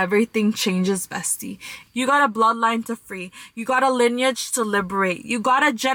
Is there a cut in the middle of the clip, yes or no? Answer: no